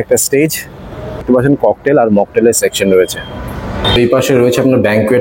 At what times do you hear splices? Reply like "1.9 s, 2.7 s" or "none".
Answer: 1.2 s, 3.8 s